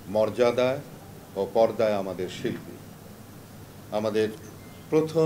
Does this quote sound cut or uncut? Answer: uncut